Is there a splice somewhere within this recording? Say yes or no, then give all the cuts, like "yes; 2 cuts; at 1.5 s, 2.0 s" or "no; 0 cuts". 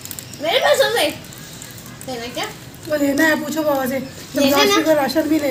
no; 0 cuts